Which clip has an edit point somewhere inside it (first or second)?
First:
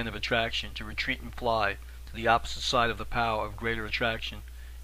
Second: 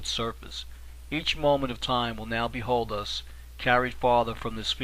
second